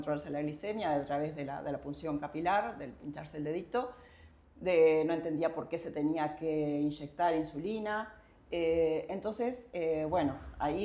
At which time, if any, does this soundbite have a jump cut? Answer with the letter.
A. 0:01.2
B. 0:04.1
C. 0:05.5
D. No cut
D